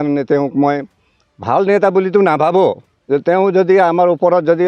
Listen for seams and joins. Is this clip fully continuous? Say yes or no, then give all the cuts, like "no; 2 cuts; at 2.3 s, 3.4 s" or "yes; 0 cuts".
no; 1 cut; at 2.9 s